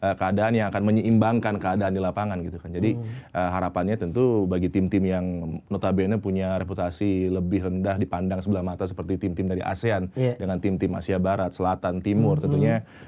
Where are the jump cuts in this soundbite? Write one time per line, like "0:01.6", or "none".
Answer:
none